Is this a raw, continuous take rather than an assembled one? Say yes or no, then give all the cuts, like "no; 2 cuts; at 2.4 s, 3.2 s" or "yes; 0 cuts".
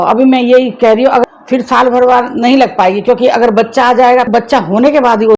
no; 2 cuts; at 1.2 s, 4.3 s